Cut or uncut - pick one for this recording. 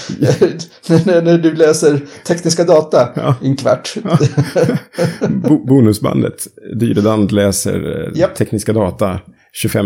uncut